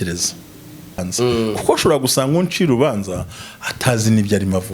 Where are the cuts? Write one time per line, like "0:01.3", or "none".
0:01.1